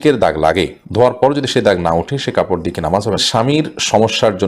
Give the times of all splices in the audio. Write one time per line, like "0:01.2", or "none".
0:03.2